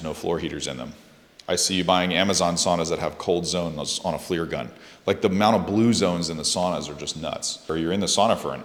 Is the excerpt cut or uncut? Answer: uncut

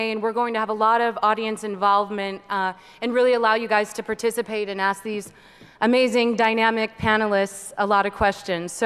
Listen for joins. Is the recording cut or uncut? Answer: uncut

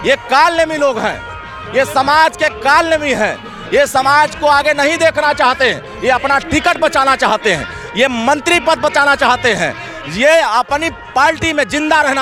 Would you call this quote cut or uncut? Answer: uncut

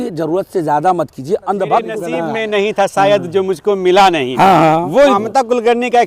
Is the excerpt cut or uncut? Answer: cut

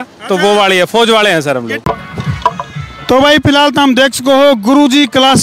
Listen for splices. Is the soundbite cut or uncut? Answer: cut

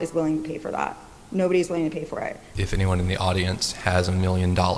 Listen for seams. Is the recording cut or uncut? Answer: cut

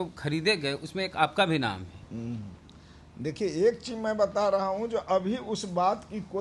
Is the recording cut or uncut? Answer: uncut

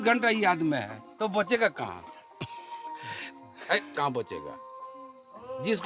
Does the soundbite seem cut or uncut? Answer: uncut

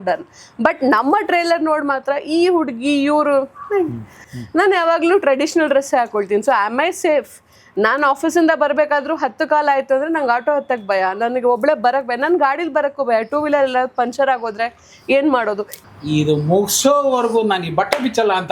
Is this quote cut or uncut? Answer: cut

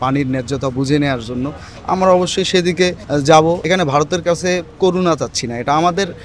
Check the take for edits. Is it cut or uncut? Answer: cut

